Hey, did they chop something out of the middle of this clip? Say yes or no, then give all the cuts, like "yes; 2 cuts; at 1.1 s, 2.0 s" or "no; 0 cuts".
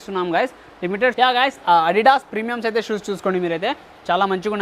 yes; 1 cut; at 1.1 s